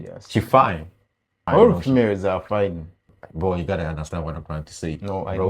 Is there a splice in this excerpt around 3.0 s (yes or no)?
yes